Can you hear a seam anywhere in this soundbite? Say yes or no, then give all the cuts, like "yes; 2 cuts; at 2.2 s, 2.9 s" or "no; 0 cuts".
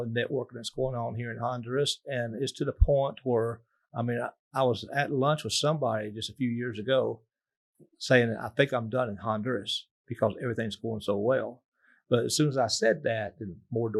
no; 0 cuts